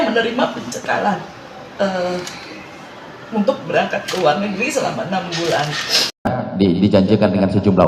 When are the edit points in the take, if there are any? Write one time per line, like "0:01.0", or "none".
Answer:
0:06.3